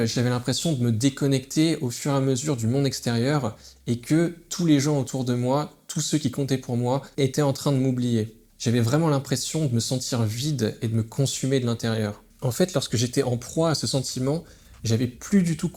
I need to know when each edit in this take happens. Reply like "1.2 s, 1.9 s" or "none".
none